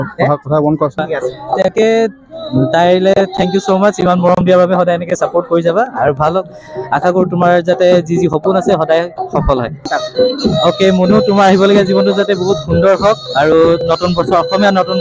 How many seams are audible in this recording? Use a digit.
2